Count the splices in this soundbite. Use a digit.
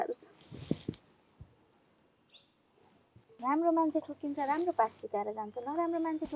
1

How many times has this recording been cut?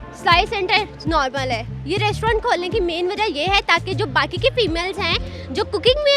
0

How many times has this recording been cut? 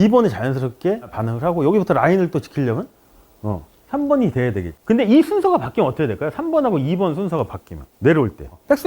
1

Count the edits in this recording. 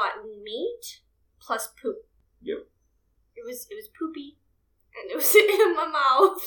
1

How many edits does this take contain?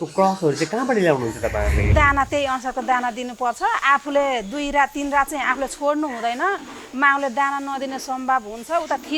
1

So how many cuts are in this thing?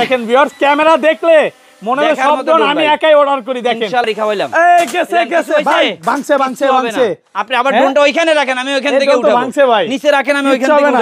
1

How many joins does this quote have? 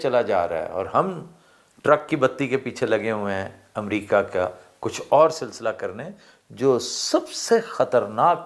0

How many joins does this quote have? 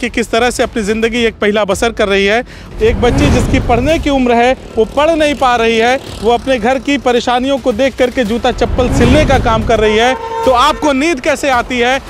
1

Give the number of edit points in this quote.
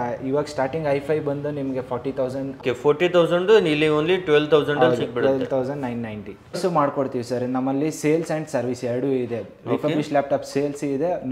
2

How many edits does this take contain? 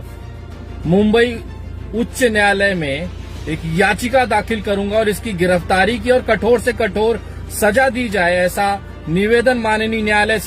0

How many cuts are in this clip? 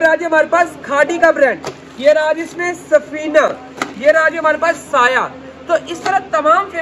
0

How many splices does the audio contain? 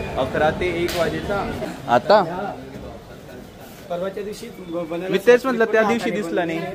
1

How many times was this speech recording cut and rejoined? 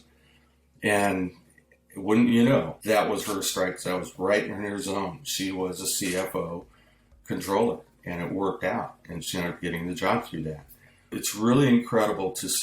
1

